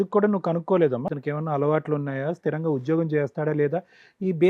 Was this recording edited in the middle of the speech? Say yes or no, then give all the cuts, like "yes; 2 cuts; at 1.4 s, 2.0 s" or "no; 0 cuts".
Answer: yes; 1 cut; at 1.1 s